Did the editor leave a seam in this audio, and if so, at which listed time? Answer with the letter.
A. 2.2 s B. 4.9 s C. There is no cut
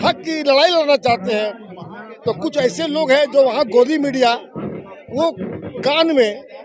C